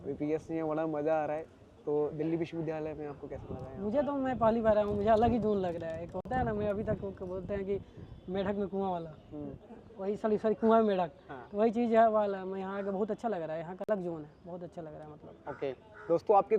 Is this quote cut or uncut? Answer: uncut